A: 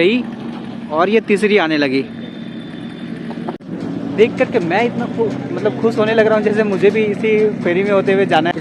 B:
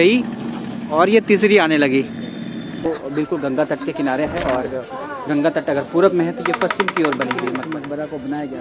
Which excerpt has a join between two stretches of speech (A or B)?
B